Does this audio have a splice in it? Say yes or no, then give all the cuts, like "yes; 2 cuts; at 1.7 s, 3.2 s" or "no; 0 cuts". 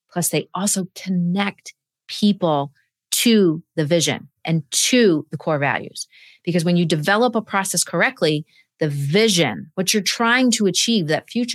no; 0 cuts